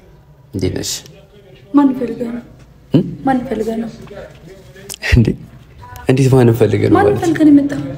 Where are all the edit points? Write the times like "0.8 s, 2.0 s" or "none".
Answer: none